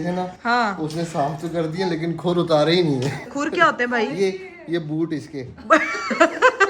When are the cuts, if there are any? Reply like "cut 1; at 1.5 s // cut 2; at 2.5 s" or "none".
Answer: cut 1; at 3.3 s